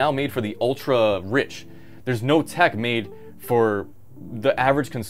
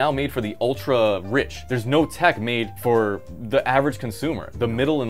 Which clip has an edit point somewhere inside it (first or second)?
second